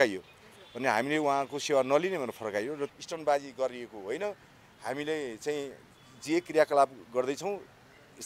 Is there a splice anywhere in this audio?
yes; 1 cut; at 3.0 s

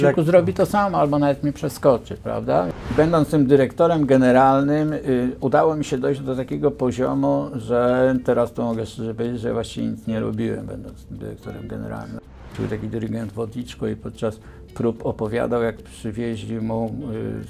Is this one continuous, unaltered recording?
no; 3 cuts; at 2.8 s, 12.4 s, 15.8 s

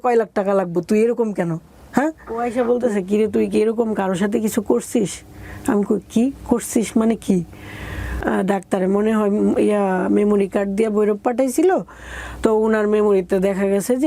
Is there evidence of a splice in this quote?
yes; 2 cuts; at 2.4 s, 8.2 s

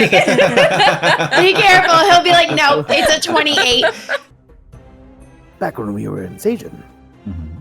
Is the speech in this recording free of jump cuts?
no; 1 cut; at 4.3 s

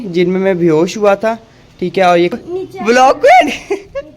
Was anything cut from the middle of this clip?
yes; 1 cut; at 2.3 s

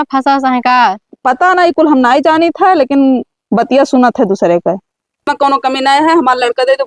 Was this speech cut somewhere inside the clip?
yes; 1 cut; at 5.2 s

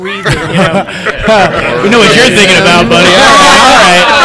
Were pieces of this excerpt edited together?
no; 0 cuts

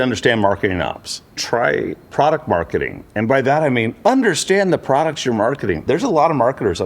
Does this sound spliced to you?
yes; 2 cuts; at 1.4 s, 5.8 s

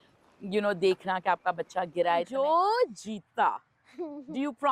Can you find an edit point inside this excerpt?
yes; 1 cut; at 2.3 s

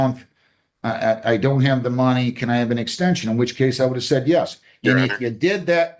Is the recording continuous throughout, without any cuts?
yes; 0 cuts

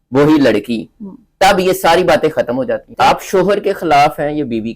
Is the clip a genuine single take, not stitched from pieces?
no; 1 cut; at 2.9 s

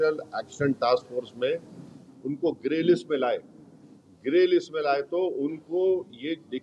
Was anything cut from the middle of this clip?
no; 0 cuts

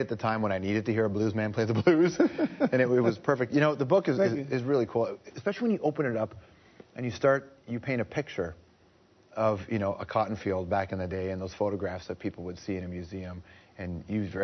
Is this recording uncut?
no; 1 cut; at 10.8 s

